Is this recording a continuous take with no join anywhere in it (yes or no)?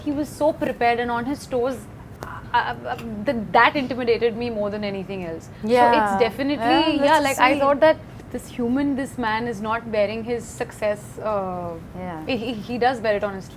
yes